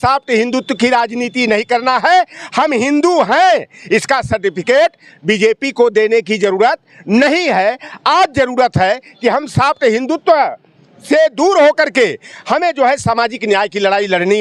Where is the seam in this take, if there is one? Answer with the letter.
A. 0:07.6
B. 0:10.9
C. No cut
C